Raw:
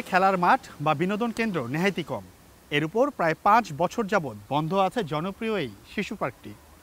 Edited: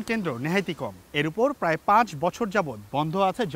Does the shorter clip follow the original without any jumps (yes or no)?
no